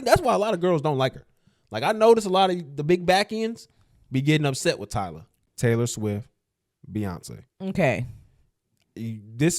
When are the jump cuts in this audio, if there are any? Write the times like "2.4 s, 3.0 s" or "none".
5.5 s